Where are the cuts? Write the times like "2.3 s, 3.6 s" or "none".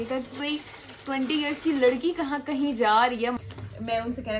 3.3 s